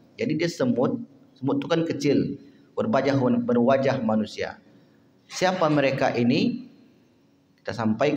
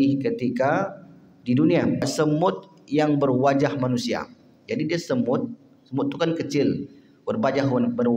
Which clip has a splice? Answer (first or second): second